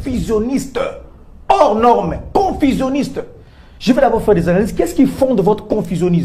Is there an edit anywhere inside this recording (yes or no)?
no